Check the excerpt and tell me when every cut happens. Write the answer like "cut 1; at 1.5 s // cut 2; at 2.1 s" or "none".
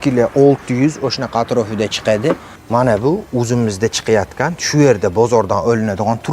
cut 1; at 2.5 s